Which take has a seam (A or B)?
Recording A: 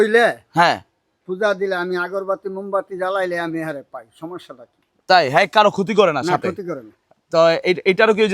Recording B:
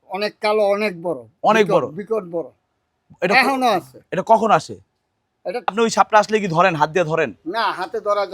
B